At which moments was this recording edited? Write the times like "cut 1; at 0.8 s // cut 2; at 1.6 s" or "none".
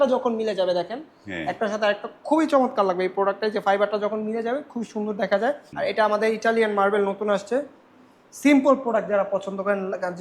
cut 1; at 5.7 s